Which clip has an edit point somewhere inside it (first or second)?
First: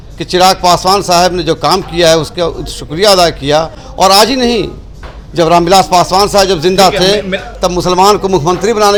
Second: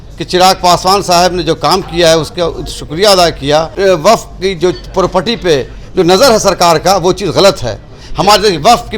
second